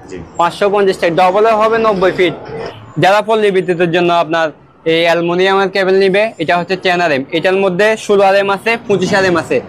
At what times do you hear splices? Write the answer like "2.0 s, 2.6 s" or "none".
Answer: 2.7 s